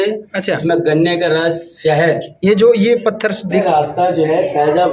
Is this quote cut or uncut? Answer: cut